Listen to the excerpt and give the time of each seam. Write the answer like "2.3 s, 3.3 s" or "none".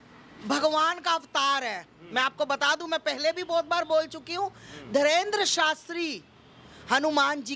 none